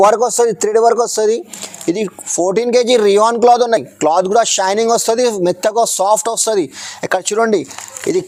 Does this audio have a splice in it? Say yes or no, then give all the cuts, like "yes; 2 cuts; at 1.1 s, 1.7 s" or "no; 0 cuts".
no; 0 cuts